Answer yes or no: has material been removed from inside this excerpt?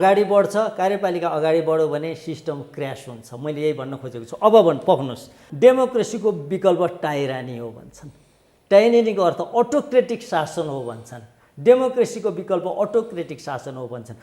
yes